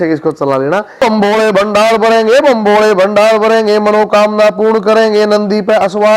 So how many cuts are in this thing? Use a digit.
1